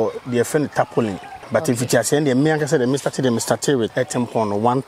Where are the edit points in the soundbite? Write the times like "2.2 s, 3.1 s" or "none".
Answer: 1.3 s, 3.9 s

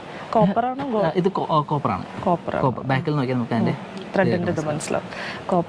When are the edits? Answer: none

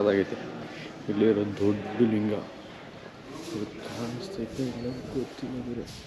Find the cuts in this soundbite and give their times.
none

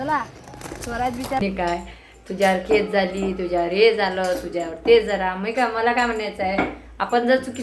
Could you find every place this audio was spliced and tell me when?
1.4 s

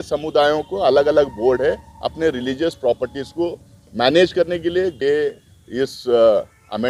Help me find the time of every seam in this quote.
4.9 s

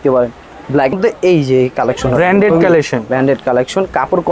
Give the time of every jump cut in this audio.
0.9 s

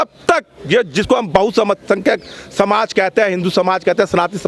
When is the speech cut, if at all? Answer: none

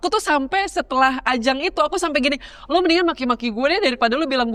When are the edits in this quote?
none

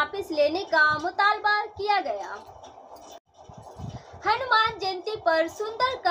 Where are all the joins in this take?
3.3 s

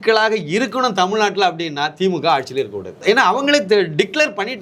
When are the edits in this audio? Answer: 3.0 s

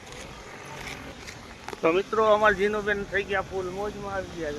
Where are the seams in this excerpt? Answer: 1.1 s

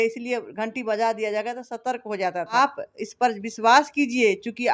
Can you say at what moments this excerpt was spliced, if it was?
2.6 s

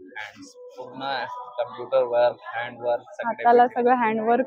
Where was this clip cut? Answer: none

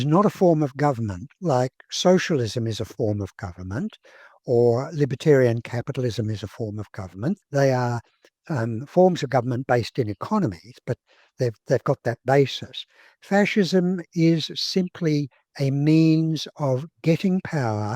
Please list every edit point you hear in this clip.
7.4 s

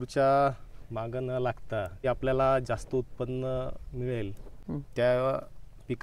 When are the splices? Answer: 2.0 s, 4.5 s

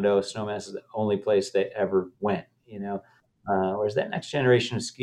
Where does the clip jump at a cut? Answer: none

